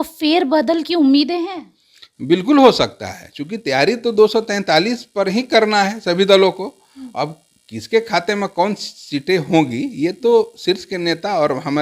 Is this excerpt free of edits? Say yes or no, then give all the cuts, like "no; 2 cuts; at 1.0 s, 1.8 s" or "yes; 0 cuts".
yes; 0 cuts